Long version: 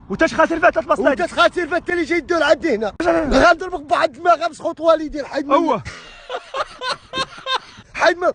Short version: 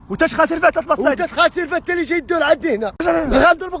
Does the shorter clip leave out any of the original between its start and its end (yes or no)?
no